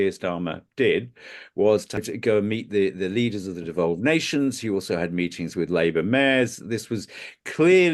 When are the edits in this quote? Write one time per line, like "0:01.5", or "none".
0:02.1